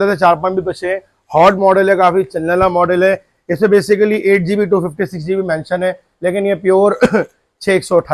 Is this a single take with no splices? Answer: yes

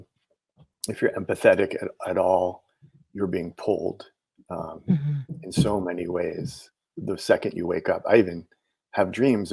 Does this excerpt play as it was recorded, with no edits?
yes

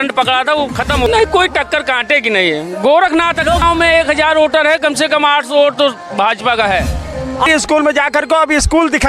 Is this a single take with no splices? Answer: no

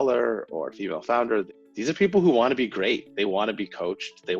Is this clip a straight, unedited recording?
no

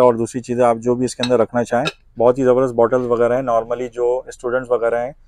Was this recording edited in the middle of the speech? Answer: yes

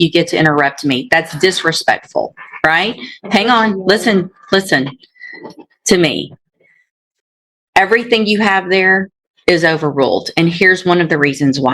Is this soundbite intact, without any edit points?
yes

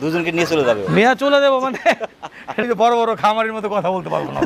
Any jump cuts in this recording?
yes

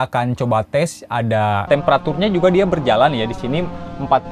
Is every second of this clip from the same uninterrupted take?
no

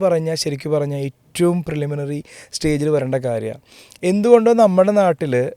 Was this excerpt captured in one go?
yes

